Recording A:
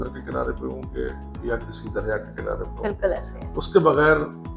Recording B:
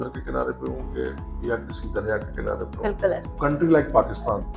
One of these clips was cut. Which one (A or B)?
B